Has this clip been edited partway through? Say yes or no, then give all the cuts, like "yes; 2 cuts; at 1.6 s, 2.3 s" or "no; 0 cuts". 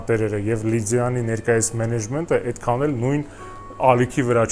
no; 0 cuts